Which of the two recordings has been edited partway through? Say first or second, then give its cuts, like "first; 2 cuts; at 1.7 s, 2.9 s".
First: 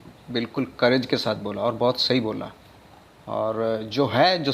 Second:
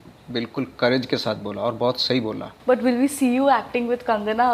second; 1 cut; at 2.5 s